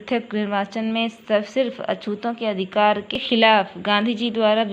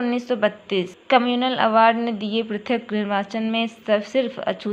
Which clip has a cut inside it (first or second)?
first